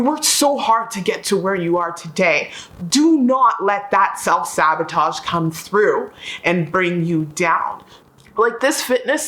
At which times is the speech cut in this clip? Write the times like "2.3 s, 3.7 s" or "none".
8.2 s